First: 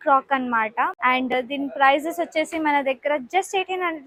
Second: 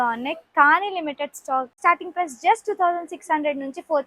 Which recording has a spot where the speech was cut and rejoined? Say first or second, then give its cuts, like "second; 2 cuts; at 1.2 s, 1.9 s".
second; 1 cut; at 1.7 s